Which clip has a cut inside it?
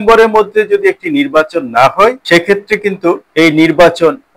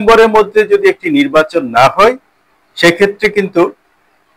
first; 2 cuts; at 2.2 s, 3.2 s

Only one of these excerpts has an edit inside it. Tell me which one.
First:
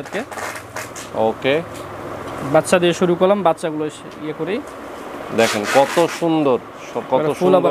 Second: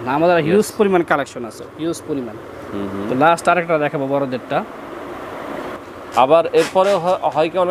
second; 1 cut; at 5.7 s

